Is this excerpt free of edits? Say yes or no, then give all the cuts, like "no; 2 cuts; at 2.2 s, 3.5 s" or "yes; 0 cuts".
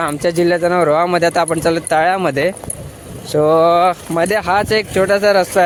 yes; 0 cuts